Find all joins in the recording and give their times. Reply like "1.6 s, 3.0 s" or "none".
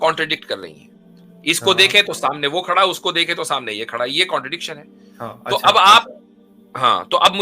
none